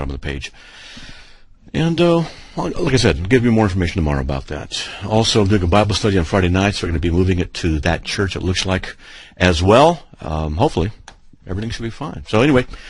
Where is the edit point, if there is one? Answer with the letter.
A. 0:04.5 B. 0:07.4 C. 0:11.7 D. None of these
C